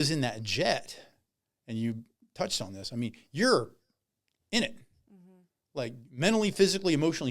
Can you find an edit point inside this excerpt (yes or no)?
no